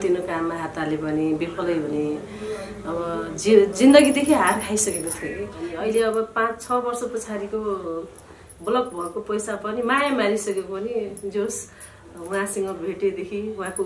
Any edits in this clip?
yes; 1 cut; at 5.5 s

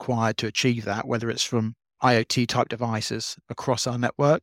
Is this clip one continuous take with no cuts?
yes; 0 cuts

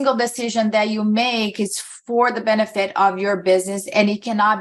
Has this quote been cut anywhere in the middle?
no; 0 cuts

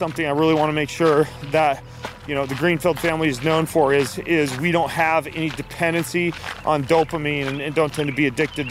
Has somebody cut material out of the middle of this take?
no; 0 cuts

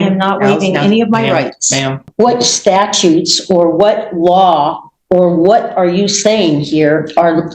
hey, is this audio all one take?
no; 1 cut; at 2.0 s

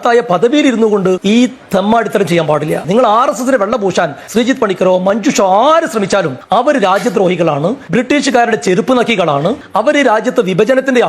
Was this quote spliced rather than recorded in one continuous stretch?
yes; 4 cuts; at 1.2 s, 4.2 s, 6.4 s, 7.8 s

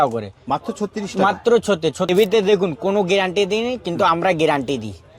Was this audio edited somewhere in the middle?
yes; 1 cut; at 2.1 s

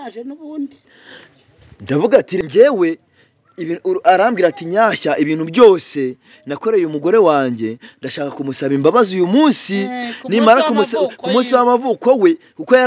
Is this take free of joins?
no; 1 cut; at 2.4 s

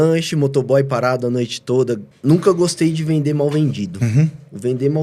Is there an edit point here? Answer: yes; 1 cut; at 2.1 s

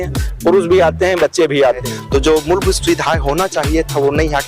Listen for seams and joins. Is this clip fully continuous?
no; 1 cut; at 1.9 s

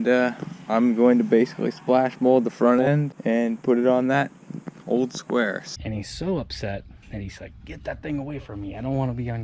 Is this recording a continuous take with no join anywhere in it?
no; 2 cuts; at 3.1 s, 5.7 s

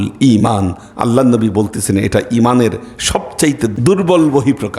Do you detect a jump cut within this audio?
yes; 1 cut; at 3.7 s

